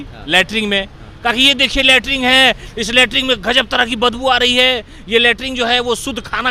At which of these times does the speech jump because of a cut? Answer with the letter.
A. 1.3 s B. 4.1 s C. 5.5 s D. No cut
D